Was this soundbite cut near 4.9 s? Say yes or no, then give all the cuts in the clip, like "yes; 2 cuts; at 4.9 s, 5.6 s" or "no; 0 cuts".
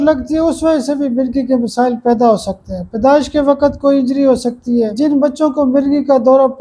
yes; 1 cut; at 4.9 s